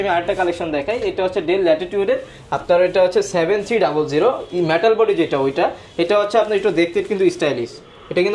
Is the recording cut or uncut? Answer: uncut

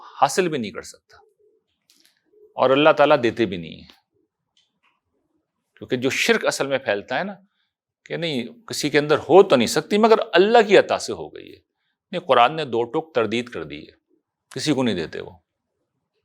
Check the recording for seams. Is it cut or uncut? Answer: uncut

